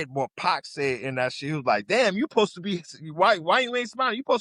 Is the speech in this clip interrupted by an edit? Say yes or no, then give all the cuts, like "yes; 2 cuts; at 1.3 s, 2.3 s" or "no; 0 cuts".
no; 0 cuts